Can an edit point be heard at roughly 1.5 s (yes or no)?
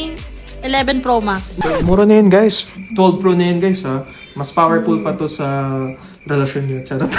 yes